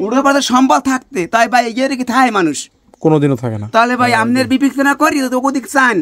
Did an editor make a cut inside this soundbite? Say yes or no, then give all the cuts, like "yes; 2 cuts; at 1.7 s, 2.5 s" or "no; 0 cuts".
no; 0 cuts